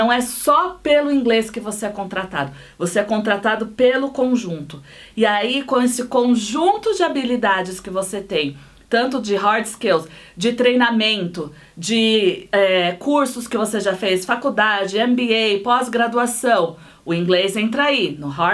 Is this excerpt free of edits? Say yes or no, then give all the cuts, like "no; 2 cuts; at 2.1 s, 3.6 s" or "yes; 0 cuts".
yes; 0 cuts